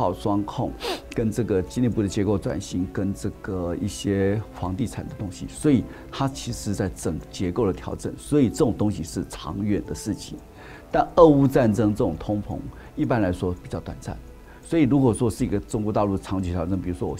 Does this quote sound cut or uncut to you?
uncut